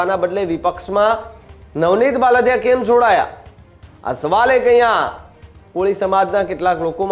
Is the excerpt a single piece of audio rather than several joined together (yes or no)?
yes